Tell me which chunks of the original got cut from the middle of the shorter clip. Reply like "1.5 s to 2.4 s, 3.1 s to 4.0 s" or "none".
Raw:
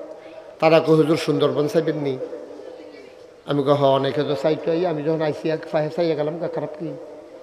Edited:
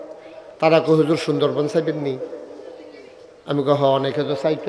none

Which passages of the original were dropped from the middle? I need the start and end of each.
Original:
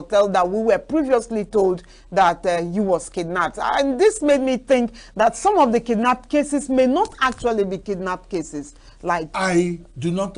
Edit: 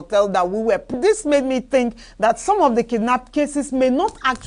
0.9 s to 3.9 s

